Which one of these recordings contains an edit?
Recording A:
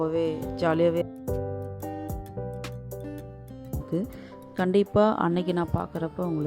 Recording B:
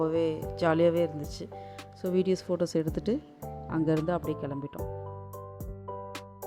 A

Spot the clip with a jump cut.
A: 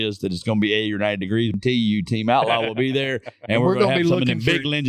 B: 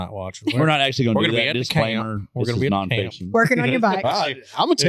A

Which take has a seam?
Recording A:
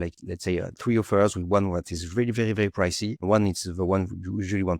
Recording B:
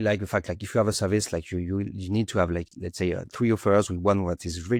A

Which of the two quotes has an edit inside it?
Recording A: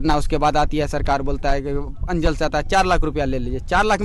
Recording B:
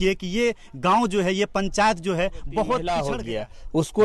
B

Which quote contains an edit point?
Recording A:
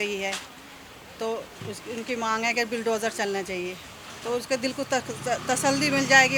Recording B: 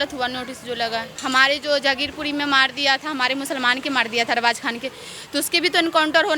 B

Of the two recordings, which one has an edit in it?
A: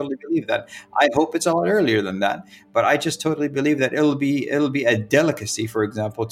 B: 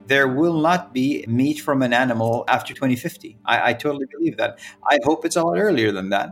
B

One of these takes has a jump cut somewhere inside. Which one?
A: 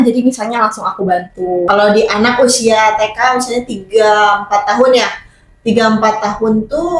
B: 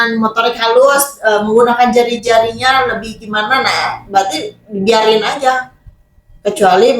A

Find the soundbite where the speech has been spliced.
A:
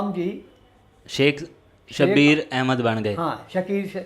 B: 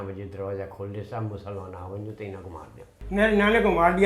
B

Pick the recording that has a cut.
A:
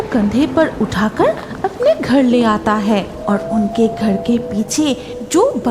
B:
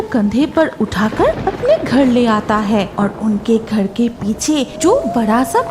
B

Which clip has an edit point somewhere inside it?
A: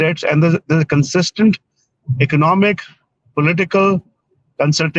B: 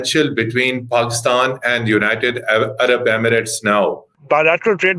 B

